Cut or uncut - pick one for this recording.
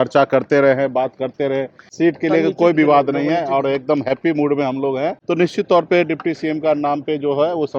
cut